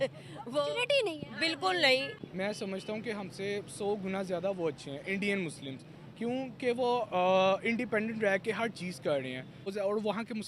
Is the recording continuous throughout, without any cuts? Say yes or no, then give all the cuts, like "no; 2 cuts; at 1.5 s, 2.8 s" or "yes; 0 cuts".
no; 2 cuts; at 2.2 s, 9.7 s